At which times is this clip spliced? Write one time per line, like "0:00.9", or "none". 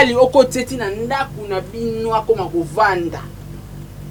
none